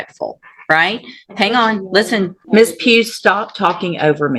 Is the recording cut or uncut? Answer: cut